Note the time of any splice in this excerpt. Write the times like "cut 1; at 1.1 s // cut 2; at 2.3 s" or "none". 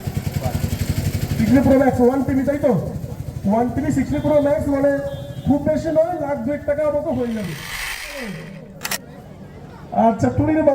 cut 1; at 7.9 s